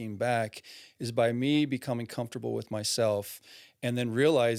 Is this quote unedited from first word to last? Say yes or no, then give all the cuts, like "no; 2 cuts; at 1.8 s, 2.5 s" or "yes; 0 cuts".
yes; 0 cuts